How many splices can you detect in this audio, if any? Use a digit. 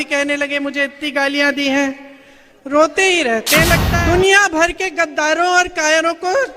1